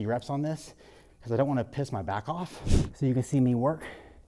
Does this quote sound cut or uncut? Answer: cut